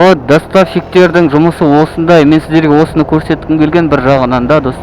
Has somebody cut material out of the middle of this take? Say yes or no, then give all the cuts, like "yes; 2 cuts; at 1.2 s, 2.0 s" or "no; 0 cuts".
no; 0 cuts